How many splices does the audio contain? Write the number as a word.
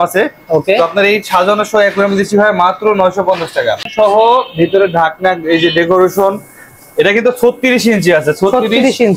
one